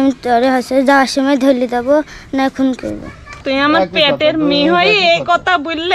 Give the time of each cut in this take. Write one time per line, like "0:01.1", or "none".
0:03.4